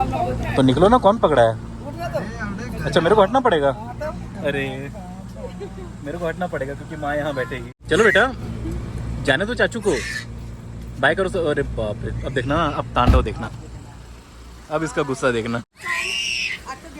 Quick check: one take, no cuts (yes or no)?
no